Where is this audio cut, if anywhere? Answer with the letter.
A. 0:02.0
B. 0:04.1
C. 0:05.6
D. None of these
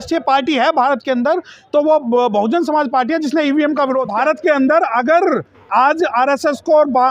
B